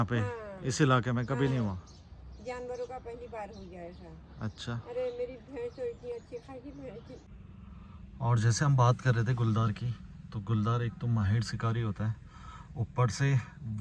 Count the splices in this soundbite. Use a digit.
1